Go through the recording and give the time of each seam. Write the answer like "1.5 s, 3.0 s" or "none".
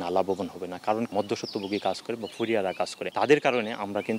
1.1 s, 3.0 s